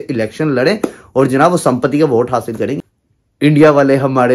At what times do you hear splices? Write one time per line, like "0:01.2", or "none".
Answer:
0:02.8